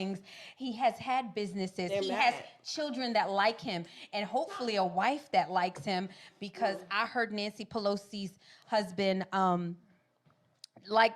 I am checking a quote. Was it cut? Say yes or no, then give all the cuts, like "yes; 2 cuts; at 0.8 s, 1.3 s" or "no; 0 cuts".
no; 0 cuts